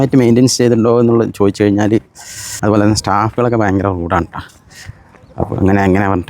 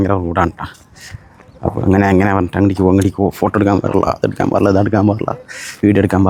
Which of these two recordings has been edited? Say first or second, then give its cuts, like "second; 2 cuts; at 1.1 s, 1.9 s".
first; 1 cut; at 2.5 s